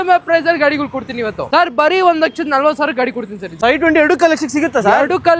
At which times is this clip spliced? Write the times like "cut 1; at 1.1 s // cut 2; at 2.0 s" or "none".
cut 1; at 1.5 s // cut 2; at 3.4 s